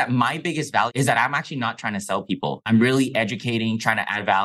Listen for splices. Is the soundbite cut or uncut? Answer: cut